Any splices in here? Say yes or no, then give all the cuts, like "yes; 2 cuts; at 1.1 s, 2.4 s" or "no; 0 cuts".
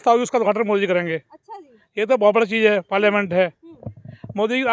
no; 0 cuts